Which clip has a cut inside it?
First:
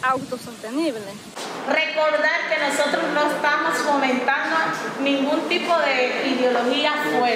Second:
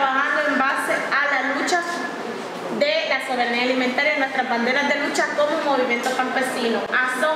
first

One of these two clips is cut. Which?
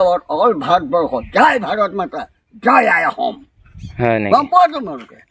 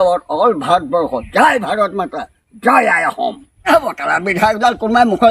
second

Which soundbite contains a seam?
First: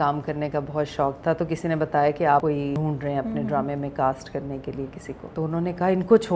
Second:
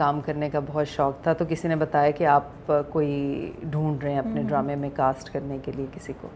first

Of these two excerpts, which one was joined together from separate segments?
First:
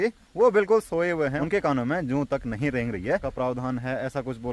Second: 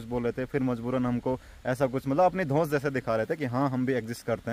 first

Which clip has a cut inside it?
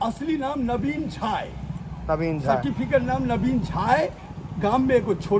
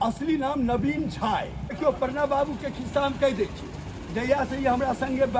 second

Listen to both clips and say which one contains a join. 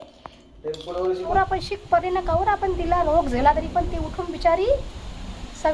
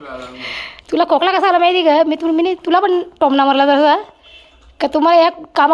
first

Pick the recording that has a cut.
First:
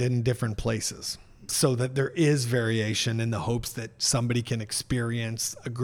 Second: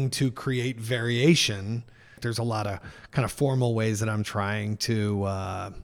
first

